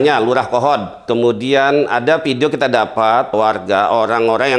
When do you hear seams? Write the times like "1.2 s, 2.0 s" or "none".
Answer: 1.0 s, 3.3 s